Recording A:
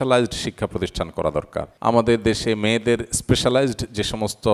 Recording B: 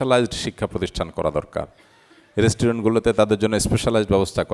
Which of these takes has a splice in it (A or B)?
A